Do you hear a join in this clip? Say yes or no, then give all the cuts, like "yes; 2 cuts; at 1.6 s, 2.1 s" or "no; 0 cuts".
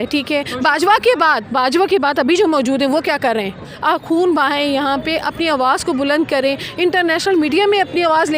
yes; 1 cut; at 3.7 s